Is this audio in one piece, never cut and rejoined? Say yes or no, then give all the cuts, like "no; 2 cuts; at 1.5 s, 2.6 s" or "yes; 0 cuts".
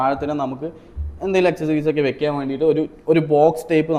yes; 0 cuts